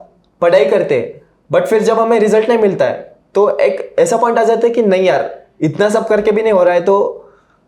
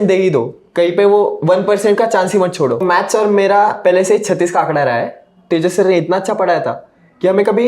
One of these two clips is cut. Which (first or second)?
second